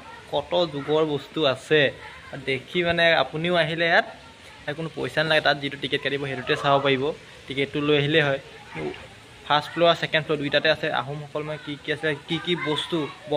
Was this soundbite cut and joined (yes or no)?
no